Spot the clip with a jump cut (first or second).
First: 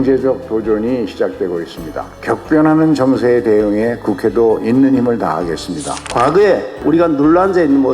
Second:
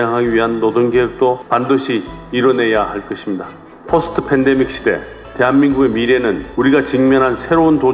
first